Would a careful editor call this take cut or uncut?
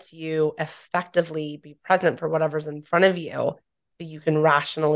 uncut